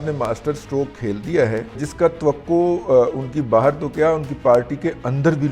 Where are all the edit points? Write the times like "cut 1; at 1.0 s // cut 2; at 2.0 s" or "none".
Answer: cut 1; at 1.8 s

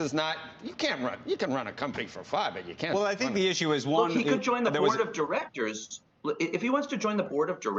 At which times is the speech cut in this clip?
none

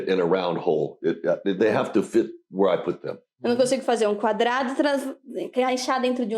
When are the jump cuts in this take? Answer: none

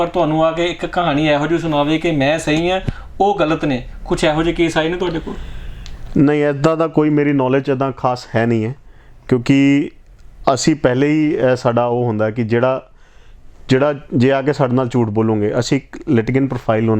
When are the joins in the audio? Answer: none

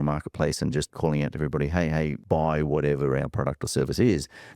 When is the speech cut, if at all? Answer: cut 1; at 0.9 s // cut 2; at 2.2 s

